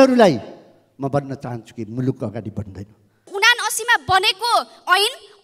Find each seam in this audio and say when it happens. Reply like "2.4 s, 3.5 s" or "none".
3.3 s